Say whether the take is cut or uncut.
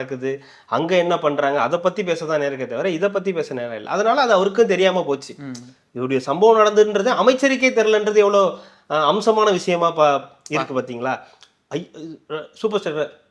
uncut